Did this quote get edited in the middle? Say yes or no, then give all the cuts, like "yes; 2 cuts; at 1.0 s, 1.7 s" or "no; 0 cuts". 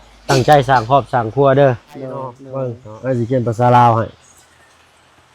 yes; 1 cut; at 2.4 s